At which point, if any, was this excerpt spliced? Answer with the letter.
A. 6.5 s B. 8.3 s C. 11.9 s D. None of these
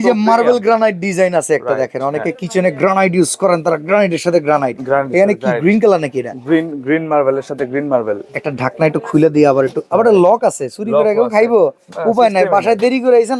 D